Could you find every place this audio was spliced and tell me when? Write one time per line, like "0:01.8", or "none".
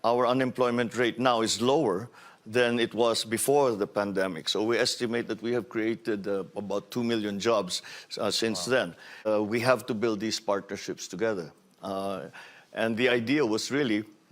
0:09.3